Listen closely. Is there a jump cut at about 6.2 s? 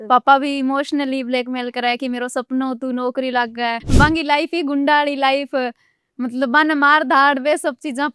no; 1 cut; at 3.8 s

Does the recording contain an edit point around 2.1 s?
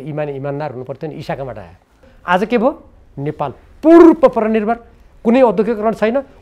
yes; 1 cut; at 2.1 s

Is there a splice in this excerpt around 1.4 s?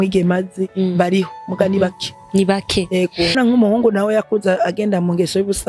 no; 1 cut; at 3.3 s

